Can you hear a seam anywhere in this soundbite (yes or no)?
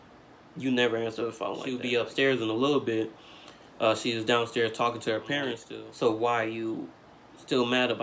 yes